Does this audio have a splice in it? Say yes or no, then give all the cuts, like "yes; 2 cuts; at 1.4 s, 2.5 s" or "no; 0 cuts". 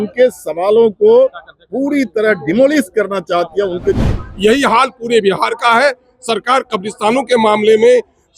yes; 1 cut; at 4.0 s